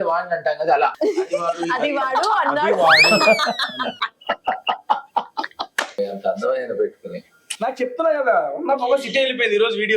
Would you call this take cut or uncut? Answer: cut